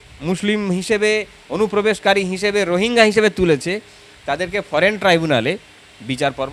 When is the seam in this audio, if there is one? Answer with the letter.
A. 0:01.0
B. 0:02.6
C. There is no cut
C